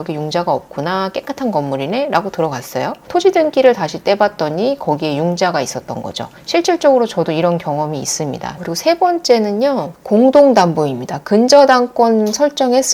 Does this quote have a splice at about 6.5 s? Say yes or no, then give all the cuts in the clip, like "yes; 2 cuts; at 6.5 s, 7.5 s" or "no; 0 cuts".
no; 2 cuts; at 3.1 s, 8.6 s